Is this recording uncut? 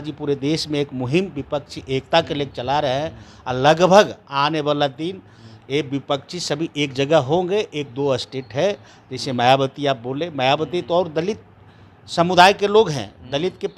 yes; 0 cuts

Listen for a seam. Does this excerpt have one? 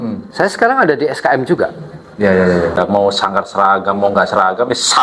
yes; 1 cut; at 2.8 s

